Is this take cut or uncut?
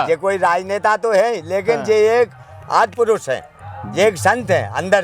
uncut